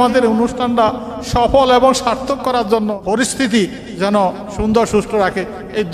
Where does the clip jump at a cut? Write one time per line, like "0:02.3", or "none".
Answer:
0:03.0